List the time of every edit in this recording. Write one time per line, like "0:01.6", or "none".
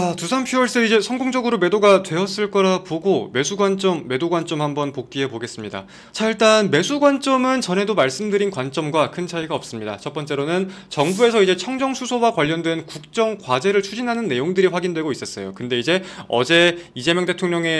0:06.0